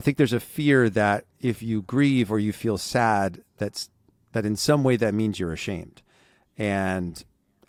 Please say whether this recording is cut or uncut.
uncut